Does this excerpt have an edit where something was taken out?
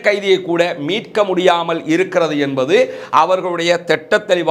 no; 0 cuts

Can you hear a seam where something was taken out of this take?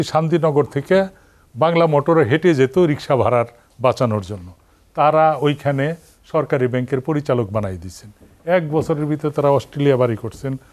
no; 0 cuts

